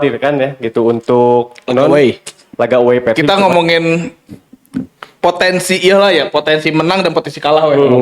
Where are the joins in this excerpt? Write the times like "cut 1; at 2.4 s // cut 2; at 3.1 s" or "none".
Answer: cut 1; at 3.3 s